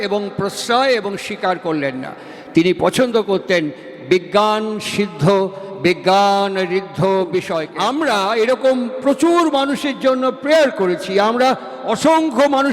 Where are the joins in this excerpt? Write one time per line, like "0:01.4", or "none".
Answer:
0:07.7